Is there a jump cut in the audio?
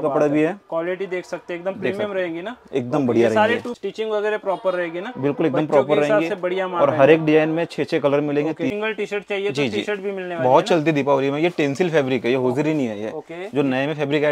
yes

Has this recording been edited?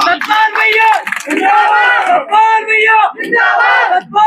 no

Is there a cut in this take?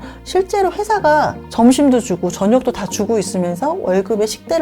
yes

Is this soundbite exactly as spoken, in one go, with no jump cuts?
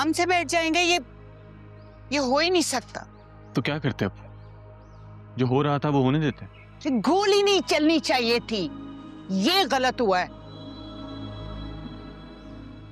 yes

